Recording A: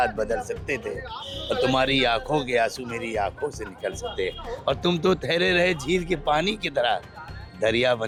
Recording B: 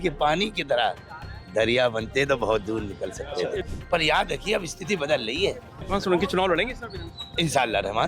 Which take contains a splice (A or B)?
B